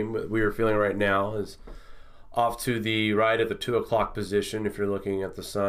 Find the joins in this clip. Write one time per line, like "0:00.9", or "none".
none